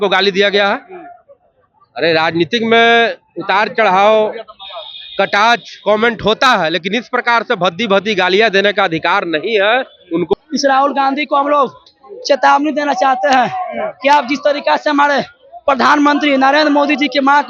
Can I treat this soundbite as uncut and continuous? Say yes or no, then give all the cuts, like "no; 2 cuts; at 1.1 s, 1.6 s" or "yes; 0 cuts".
no; 1 cut; at 10.3 s